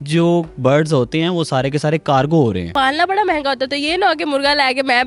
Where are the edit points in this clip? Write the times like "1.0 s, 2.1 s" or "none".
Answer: 2.7 s